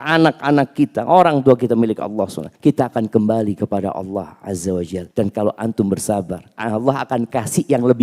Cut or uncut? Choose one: cut